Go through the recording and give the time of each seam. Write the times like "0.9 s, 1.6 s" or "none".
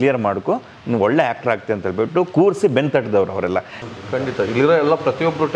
3.7 s